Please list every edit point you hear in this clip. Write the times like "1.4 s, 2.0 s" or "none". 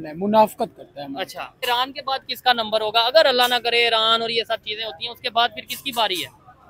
1.6 s